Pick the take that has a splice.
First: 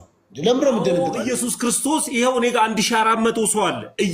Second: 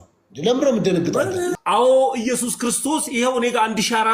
first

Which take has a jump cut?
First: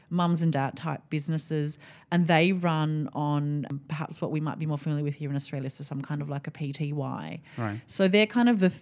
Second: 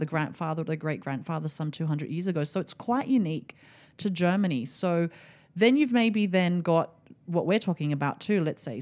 first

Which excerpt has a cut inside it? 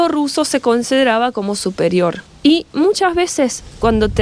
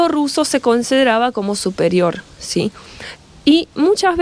first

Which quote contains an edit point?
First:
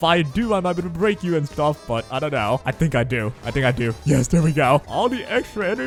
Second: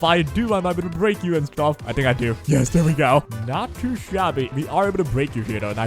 second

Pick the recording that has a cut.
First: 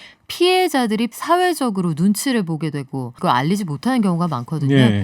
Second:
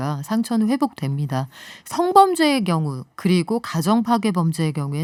first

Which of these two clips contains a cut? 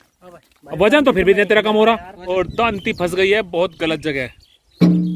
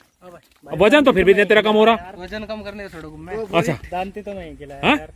first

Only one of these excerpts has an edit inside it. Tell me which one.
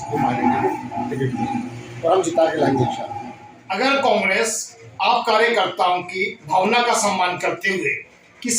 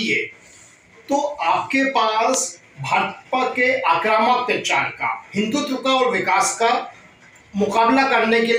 first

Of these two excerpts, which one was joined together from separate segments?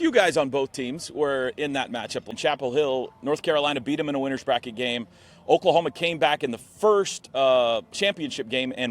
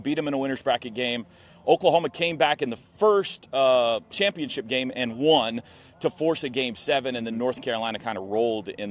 first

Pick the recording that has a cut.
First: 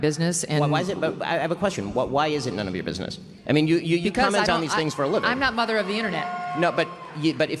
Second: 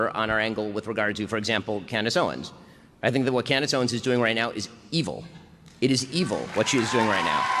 first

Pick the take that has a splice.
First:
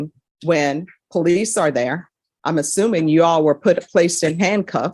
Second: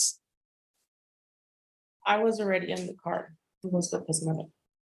second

